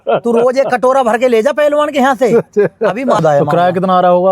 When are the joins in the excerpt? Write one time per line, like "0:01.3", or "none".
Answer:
0:03.2